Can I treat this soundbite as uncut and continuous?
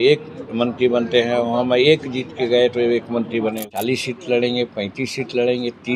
no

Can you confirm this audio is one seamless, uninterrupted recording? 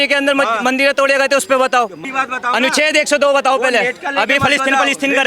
no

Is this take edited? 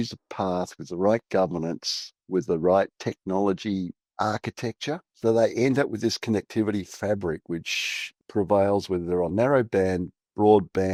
no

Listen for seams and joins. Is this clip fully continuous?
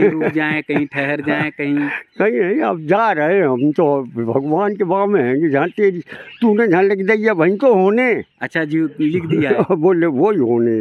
yes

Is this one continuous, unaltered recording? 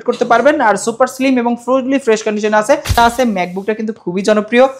no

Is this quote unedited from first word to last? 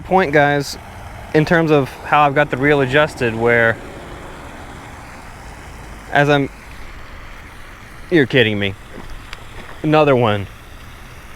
yes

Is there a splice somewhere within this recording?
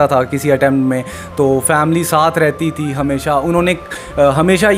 no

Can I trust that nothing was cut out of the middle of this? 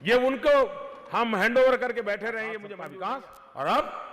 no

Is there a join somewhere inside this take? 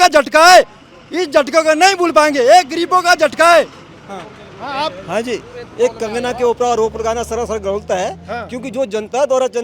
no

